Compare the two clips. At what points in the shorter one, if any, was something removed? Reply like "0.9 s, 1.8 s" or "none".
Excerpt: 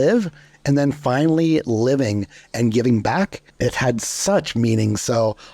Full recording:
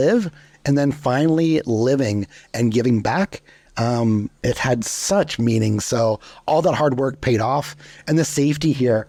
3.5 s